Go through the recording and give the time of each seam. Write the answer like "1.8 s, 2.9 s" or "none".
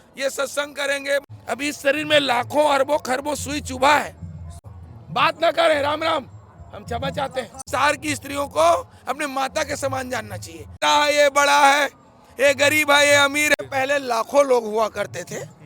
1.2 s, 4.8 s, 7.7 s, 10.8 s, 13.6 s